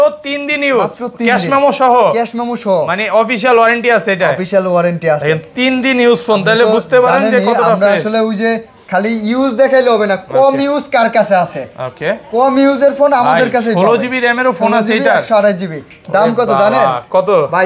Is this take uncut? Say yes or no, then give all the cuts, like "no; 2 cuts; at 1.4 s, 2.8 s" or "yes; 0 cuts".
yes; 0 cuts